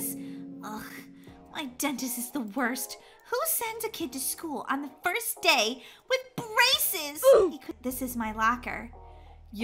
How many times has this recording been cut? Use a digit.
1